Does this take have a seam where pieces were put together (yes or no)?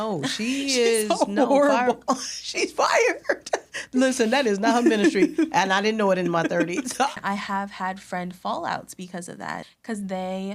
yes